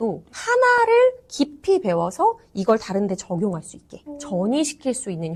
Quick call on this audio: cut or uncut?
uncut